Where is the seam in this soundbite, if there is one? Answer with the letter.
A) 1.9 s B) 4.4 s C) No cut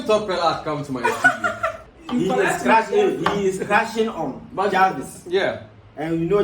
A